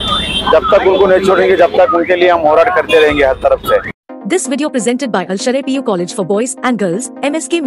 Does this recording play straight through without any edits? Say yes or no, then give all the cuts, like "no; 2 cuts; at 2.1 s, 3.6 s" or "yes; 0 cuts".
no; 1 cut; at 4.1 s